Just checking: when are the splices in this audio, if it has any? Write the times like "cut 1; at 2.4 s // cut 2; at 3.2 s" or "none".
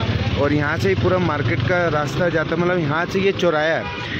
none